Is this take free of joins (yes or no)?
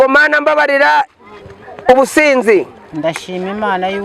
yes